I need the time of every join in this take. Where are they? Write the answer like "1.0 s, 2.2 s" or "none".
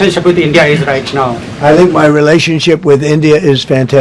none